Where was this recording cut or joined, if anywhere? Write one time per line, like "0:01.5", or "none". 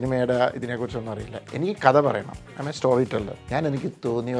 0:03.4